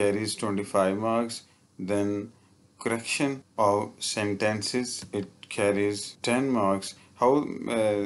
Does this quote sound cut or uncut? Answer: cut